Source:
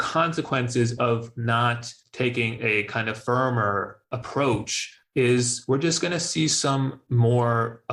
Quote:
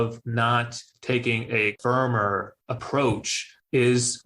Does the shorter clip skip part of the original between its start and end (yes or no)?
yes